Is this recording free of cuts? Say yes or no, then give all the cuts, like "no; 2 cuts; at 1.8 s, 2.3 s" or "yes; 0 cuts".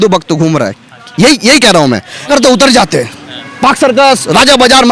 no; 1 cut; at 2.3 s